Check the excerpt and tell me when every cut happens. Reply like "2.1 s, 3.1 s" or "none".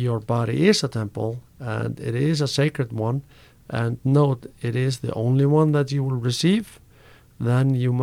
none